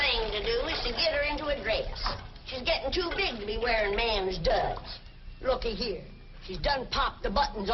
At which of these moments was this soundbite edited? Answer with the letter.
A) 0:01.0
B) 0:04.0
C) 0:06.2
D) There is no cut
C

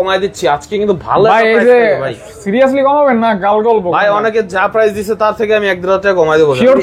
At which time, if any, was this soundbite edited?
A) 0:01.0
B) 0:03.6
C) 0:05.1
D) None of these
D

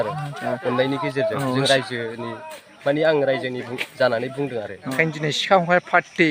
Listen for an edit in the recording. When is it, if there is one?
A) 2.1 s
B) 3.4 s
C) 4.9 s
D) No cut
C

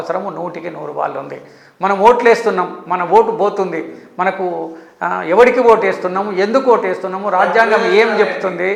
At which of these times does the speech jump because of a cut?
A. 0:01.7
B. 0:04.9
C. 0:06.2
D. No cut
D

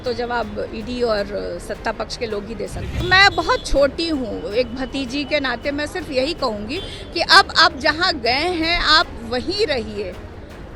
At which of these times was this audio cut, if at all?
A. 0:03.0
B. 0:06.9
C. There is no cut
A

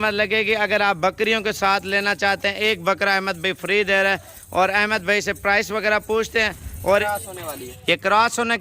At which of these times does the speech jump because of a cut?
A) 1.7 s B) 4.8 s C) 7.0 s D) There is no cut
C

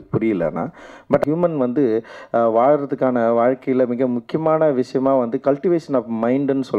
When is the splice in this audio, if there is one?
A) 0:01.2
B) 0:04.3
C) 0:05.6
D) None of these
A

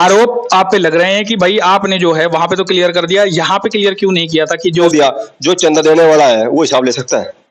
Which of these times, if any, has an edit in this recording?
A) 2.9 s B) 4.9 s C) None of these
B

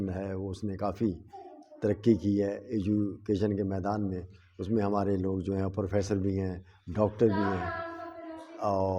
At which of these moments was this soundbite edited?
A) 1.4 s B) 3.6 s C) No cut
C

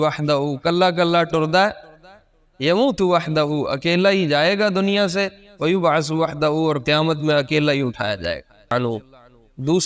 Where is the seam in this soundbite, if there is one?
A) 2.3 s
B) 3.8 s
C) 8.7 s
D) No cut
C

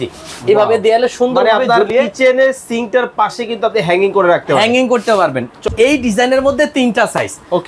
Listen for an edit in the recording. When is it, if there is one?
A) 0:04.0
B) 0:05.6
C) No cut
B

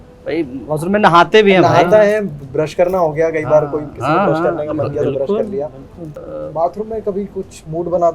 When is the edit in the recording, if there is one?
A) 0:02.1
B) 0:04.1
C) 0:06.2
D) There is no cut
C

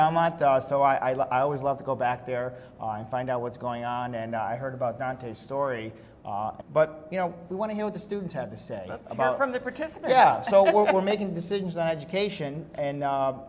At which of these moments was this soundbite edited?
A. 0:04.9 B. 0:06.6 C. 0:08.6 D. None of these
D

